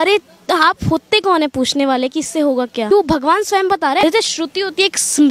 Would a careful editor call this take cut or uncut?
cut